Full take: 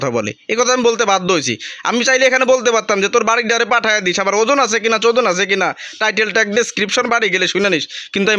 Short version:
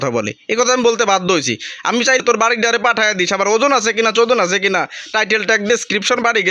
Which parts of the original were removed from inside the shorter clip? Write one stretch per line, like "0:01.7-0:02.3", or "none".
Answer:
0:02.2-0:03.1